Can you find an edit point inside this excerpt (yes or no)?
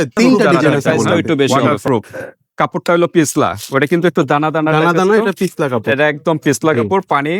yes